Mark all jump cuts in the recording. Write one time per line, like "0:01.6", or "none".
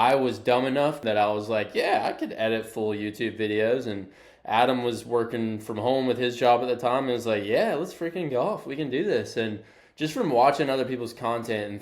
0:01.0